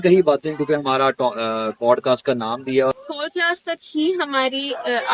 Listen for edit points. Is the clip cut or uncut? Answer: cut